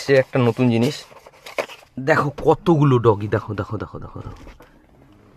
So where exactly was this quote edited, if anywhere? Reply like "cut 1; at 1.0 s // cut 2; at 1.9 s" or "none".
cut 1; at 1.9 s